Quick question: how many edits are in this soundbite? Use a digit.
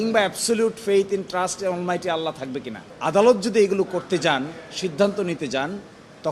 1